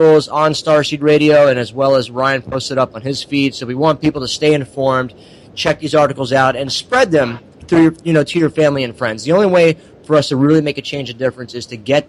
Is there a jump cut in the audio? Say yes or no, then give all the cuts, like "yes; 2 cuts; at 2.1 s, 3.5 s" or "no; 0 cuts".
yes; 1 cut; at 7.0 s